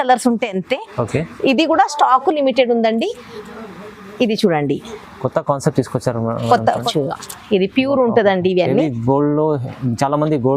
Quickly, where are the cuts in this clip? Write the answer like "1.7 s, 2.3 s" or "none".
6.8 s

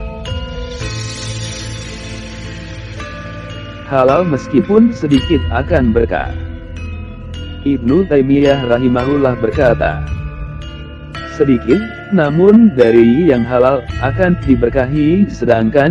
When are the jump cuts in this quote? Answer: 0.9 s, 3.9 s, 6.3 s, 7.6 s

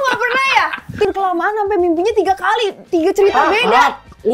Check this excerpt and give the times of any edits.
1.0 s

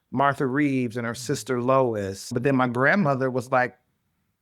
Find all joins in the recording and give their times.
2.3 s

